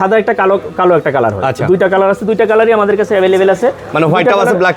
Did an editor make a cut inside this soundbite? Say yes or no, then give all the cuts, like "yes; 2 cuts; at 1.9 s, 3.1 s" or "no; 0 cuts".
no; 0 cuts